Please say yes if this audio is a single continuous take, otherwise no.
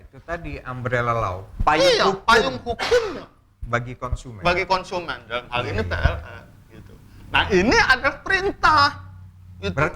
yes